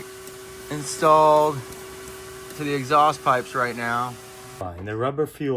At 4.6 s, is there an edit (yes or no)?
yes